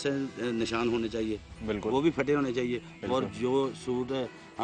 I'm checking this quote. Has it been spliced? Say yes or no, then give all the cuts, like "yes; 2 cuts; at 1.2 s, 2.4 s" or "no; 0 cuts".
no; 0 cuts